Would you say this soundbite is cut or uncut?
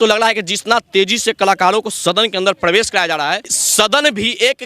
cut